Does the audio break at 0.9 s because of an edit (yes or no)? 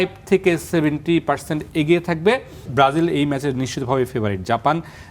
no